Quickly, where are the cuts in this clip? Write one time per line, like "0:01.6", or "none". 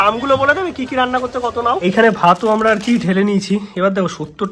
0:01.8